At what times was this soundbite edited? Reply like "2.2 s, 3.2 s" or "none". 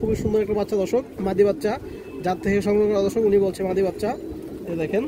none